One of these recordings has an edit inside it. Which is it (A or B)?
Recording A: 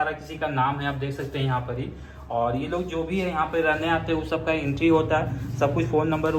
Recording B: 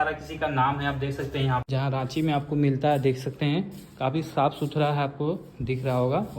B